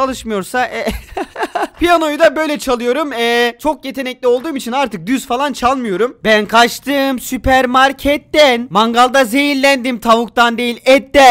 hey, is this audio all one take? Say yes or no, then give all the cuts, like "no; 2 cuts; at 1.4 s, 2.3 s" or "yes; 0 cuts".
yes; 0 cuts